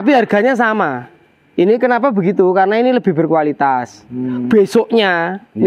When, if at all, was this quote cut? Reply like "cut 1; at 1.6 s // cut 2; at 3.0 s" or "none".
none